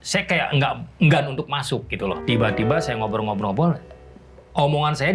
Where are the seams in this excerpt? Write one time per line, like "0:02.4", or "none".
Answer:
0:02.2